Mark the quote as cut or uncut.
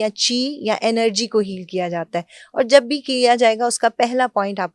uncut